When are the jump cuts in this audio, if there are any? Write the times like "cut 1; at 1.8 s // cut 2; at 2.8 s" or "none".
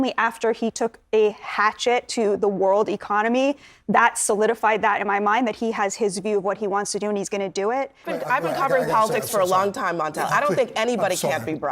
cut 1; at 8.1 s